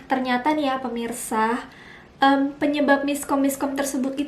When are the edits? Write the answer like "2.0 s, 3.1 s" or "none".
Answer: none